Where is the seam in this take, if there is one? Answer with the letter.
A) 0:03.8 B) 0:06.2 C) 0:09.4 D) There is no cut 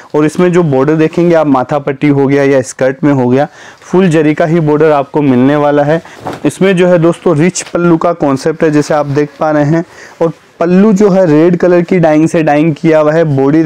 B